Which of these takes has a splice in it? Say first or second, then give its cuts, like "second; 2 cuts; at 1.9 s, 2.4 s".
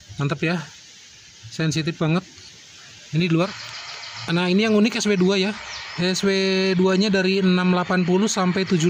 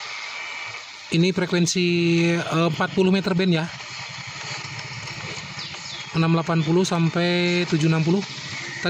first; 1 cut; at 3.5 s